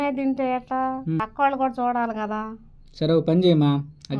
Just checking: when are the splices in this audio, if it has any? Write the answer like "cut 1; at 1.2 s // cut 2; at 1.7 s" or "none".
cut 1; at 1.2 s